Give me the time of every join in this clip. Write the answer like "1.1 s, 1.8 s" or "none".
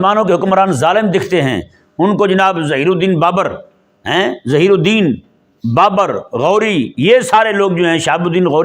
none